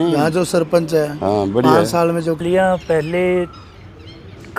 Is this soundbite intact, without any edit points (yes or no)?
no